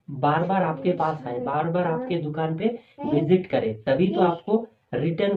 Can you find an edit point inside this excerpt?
no; 0 cuts

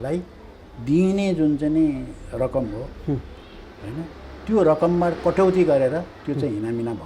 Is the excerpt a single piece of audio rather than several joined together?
yes; 0 cuts

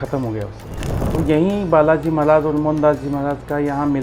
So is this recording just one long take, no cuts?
no; 1 cut; at 1.0 s

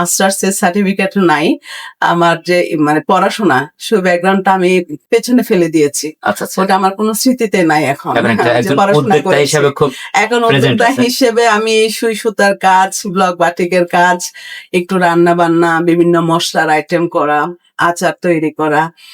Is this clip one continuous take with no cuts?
yes; 0 cuts

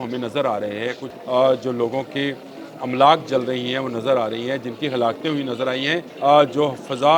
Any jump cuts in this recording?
yes; 2 cuts; at 1.1 s, 6.1 s

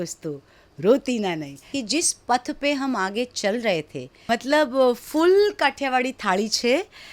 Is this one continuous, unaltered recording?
no; 2 cuts; at 1.7 s, 4.2 s

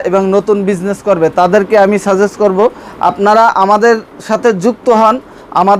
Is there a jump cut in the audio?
no; 0 cuts

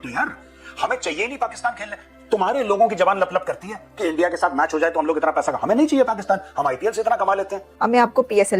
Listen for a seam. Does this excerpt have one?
yes; 1 cut; at 7.6 s

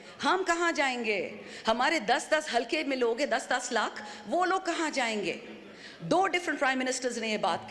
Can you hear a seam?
no; 0 cuts

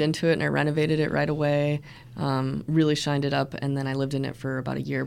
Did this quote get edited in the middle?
no; 0 cuts

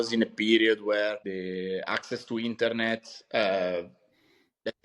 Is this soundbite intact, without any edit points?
no; 1 cut; at 1.2 s

